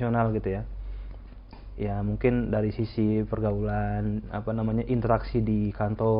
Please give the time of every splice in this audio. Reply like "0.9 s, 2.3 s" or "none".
none